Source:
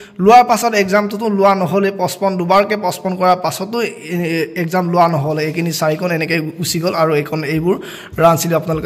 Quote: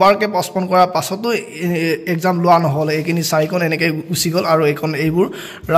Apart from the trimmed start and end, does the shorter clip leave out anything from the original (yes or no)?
no